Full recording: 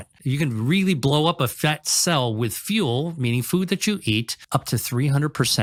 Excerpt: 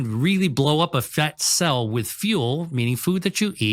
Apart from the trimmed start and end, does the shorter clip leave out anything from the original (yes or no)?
no